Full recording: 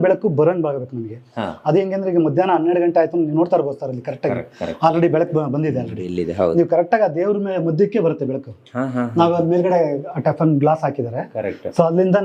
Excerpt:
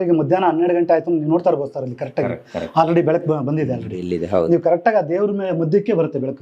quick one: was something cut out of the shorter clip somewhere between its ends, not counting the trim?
no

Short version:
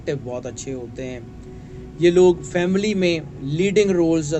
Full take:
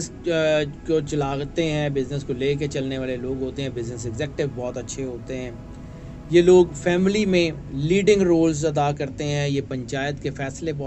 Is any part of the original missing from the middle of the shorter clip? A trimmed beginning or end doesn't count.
no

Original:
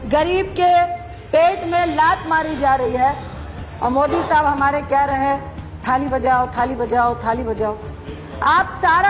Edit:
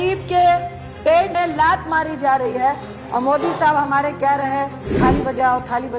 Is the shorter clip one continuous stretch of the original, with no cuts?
no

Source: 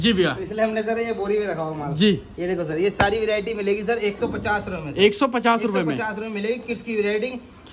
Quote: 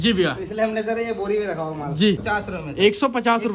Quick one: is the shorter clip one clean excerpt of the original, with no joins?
no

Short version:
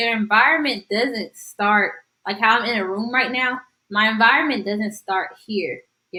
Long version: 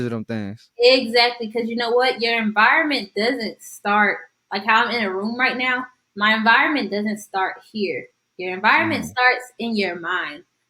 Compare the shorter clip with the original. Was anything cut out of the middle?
no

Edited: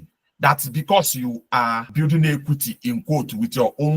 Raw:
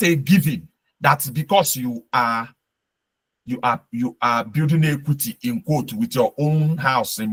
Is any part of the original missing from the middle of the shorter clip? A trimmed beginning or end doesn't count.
yes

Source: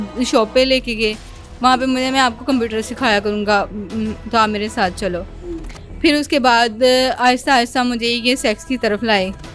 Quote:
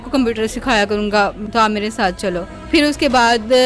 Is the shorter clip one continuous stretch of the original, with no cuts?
no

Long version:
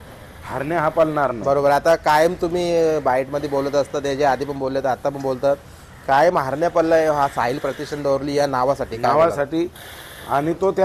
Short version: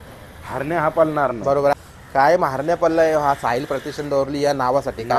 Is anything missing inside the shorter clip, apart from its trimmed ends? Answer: yes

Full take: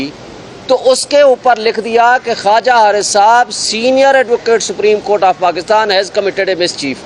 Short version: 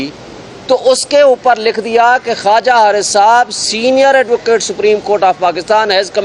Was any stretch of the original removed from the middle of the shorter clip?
no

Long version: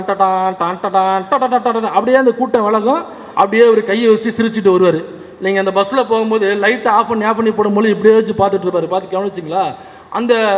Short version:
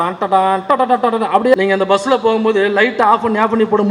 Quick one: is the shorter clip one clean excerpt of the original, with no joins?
no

